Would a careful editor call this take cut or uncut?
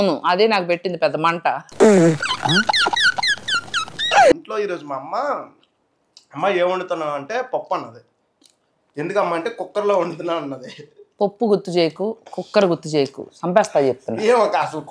cut